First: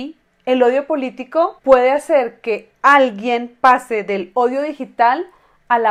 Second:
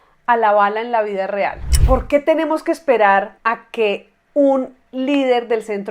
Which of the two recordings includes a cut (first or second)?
second